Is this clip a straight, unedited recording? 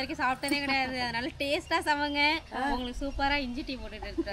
yes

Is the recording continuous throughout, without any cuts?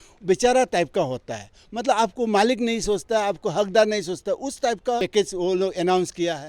no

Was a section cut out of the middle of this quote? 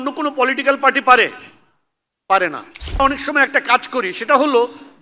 yes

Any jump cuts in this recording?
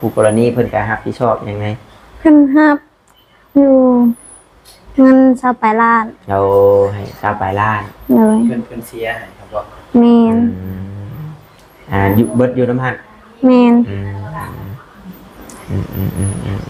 no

